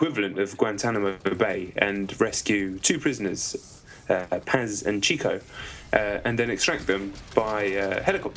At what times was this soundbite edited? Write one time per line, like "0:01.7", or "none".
0:04.4